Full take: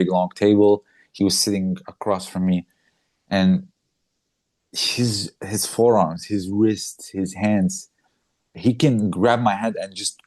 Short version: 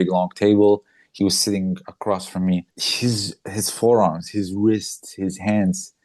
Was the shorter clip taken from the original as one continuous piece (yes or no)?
no